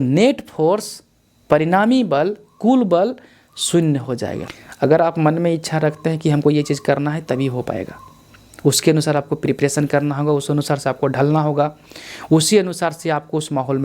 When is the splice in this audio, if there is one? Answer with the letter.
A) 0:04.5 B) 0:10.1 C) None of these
A